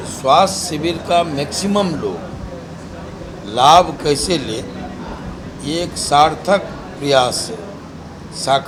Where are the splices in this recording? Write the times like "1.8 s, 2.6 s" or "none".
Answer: none